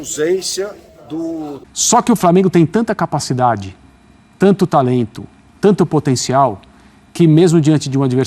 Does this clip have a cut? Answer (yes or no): yes